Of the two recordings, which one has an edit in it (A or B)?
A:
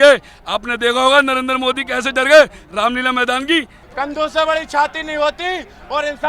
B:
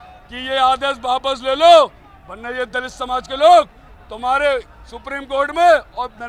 A